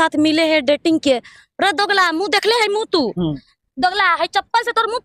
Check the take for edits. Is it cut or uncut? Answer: uncut